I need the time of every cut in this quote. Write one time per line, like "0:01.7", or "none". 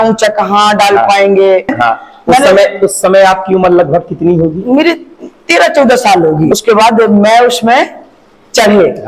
0:01.7
0:06.5